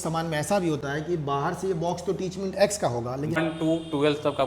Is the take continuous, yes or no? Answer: no